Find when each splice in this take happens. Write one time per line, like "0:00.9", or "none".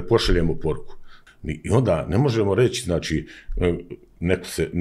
0:01.2